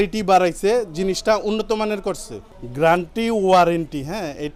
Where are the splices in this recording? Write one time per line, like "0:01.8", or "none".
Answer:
none